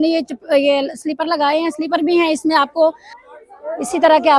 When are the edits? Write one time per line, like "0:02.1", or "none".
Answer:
0:03.1